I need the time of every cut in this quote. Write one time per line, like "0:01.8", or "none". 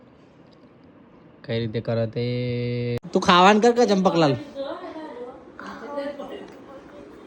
0:03.0

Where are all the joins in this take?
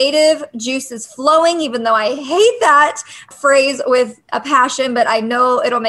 0:03.2

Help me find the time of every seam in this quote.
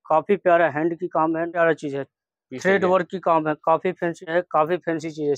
0:01.5
0:04.3

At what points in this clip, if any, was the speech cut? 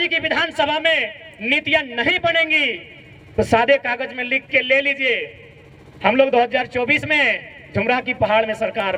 none

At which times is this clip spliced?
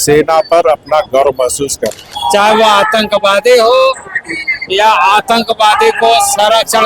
0:02.1

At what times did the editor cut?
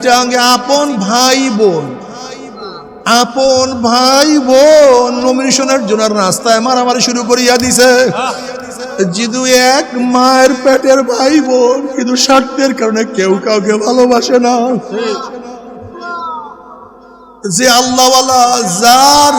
0:16.0

